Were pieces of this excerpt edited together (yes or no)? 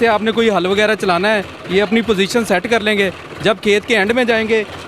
no